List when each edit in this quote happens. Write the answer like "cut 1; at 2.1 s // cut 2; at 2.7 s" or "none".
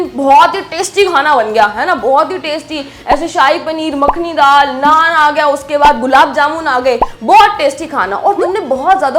none